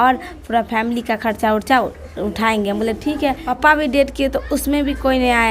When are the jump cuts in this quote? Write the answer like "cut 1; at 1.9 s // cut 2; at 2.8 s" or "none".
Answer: cut 1; at 3.5 s